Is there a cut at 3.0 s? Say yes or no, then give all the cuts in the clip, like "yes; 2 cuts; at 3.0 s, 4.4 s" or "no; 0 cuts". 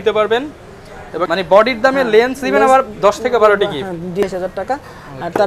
no; 2 cuts; at 1.2 s, 4.2 s